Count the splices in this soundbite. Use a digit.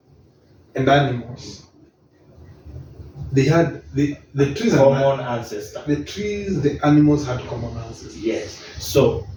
0